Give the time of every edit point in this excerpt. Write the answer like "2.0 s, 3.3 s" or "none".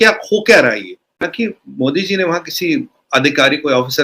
1.3 s